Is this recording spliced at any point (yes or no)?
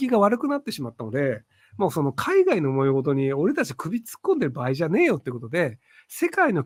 no